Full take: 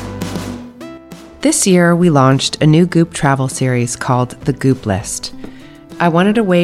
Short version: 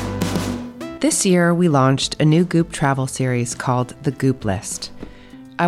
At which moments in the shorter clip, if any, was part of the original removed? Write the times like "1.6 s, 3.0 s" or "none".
0.9 s